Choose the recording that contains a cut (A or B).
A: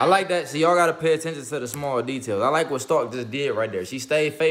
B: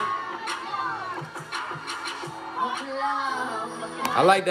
B